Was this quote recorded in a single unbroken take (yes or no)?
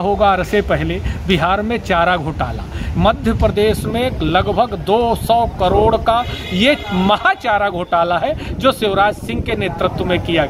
yes